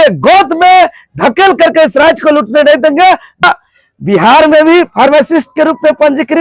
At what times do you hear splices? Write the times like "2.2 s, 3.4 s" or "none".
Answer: 3.4 s